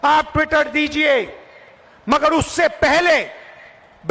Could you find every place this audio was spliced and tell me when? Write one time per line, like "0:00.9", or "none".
none